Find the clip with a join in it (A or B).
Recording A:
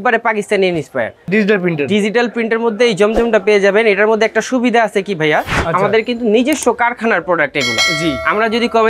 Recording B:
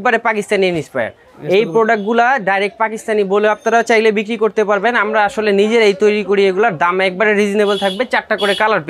A